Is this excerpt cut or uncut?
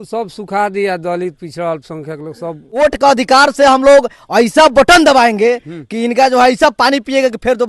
cut